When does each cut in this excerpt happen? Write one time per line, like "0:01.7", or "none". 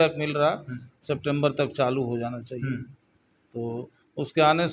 none